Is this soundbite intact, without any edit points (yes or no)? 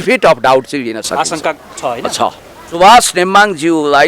no